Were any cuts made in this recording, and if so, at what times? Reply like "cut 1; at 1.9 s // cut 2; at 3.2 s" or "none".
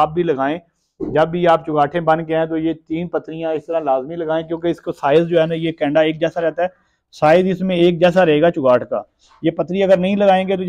none